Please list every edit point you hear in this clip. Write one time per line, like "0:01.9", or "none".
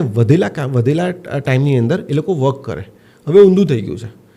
none